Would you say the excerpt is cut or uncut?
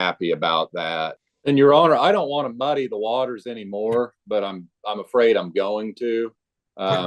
cut